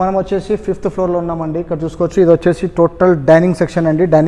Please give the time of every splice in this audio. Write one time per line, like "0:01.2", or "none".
none